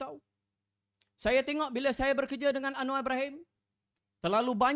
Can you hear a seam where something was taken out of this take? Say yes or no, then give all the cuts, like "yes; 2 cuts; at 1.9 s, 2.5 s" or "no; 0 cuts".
no; 0 cuts